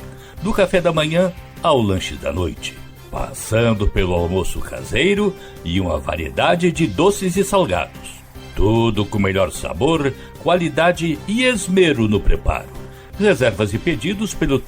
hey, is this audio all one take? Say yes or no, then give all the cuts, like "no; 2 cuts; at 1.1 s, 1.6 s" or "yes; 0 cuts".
yes; 0 cuts